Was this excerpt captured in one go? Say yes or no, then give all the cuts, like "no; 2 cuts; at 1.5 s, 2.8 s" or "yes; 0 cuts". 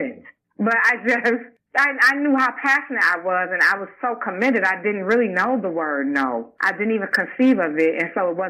yes; 0 cuts